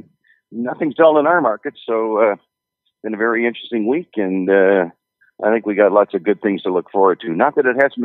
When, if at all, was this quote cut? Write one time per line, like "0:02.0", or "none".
0:03.8